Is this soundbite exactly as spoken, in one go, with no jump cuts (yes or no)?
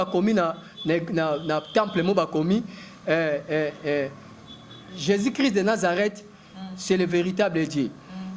yes